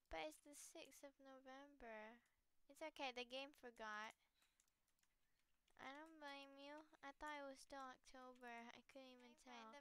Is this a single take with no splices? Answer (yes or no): yes